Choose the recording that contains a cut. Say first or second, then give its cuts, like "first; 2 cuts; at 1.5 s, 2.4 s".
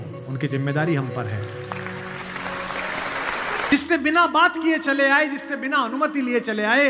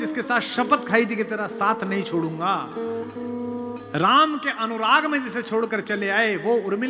first; 1 cut; at 3.7 s